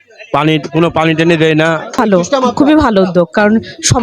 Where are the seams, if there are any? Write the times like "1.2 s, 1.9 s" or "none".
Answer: 2.0 s